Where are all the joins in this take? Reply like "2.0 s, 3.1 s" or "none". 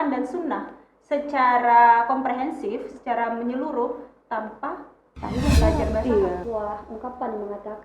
6.4 s